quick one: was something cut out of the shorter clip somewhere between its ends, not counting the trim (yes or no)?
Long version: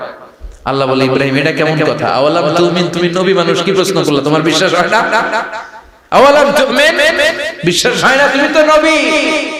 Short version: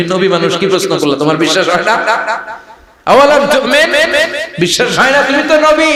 no